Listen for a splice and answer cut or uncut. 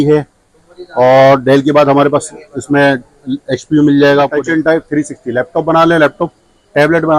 cut